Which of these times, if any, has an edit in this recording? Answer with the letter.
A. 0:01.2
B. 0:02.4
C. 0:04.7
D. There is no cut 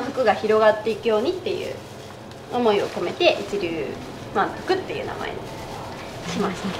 D